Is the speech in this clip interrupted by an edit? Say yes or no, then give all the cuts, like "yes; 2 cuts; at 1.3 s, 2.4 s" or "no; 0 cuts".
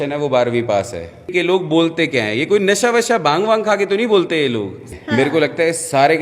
yes; 2 cuts; at 1.2 s, 4.8 s